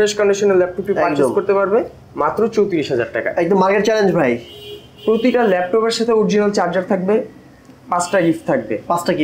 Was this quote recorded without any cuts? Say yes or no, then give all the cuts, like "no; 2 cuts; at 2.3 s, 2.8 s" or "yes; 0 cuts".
yes; 0 cuts